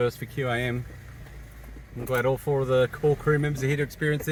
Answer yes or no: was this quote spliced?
no